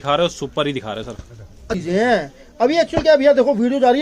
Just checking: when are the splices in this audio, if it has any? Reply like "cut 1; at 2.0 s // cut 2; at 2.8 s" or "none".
cut 1; at 1.7 s